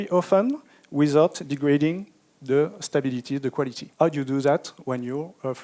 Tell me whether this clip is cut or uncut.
cut